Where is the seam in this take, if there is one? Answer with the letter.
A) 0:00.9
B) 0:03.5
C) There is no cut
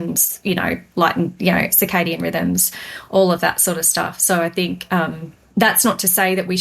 C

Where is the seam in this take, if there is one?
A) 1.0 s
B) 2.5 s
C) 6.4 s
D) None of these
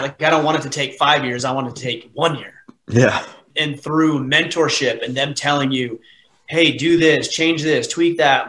D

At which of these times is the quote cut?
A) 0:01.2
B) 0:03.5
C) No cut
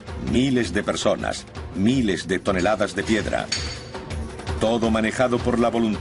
B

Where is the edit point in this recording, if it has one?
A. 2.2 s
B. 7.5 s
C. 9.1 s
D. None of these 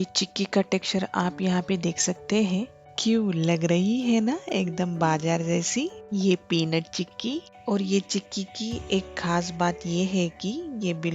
B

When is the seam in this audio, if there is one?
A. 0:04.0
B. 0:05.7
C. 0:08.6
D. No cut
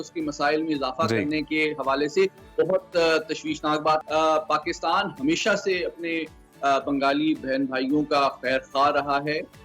A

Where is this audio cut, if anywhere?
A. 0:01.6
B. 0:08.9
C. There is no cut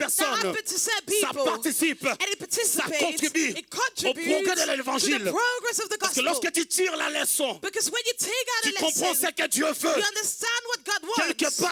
C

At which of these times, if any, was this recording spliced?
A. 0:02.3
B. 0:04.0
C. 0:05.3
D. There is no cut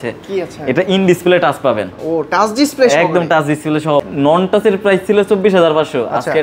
B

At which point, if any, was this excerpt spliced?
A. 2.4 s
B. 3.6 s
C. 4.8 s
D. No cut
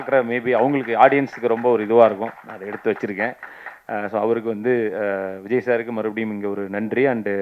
D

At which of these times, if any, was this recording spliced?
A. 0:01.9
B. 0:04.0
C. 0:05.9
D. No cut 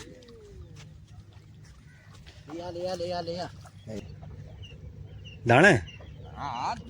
B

